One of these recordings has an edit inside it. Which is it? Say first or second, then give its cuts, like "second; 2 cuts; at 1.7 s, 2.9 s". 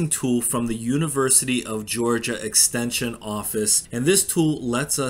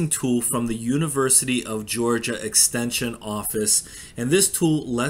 first; 1 cut; at 3.8 s